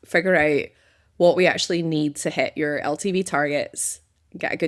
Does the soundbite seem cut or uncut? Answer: uncut